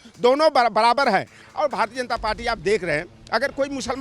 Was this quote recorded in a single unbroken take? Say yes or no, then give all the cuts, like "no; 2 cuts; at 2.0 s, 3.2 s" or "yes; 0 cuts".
no; 1 cut; at 1.4 s